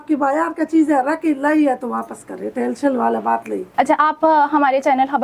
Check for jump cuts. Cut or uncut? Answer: uncut